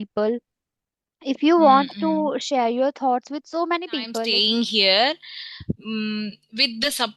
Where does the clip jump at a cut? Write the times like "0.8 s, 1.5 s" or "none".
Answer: 4.2 s